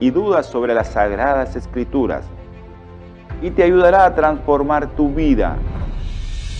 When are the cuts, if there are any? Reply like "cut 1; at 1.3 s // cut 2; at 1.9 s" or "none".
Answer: none